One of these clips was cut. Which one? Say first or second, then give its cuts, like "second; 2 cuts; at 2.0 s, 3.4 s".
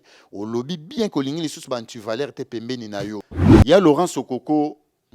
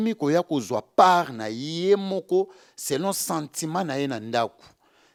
first; 1 cut; at 3.4 s